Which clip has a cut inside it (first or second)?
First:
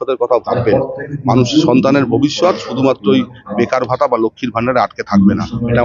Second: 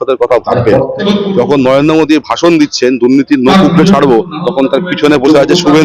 second